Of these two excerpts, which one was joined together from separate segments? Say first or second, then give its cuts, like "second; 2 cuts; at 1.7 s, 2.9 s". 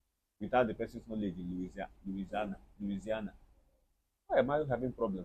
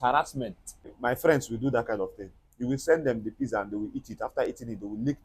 second; 1 cut; at 0.9 s